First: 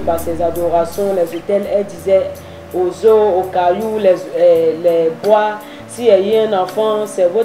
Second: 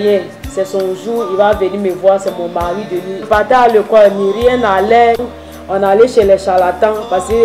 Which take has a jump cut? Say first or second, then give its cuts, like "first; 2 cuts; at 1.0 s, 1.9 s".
second; 2 cuts; at 3.3 s, 5.2 s